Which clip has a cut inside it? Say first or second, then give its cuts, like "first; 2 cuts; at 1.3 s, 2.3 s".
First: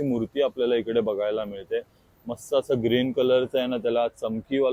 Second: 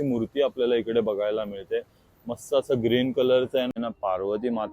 second; 1 cut; at 3.8 s